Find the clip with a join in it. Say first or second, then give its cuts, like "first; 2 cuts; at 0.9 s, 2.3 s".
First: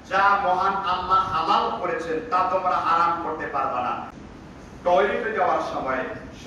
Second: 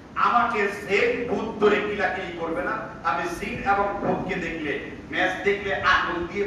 first; 1 cut; at 4.1 s